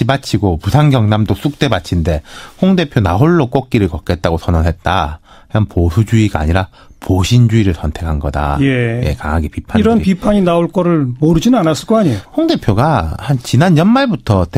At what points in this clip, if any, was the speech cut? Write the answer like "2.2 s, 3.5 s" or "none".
none

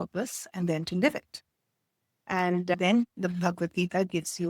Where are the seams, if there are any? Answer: 2.7 s

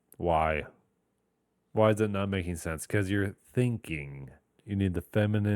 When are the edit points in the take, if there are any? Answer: 4.6 s

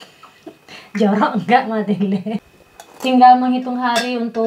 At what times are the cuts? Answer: 2.6 s

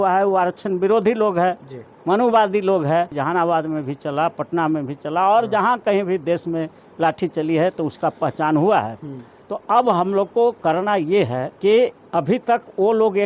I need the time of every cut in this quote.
3.2 s, 11.4 s, 12.0 s

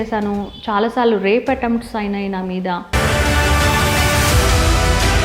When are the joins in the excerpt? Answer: none

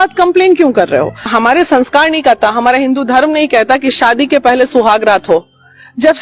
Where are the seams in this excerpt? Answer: 1.2 s

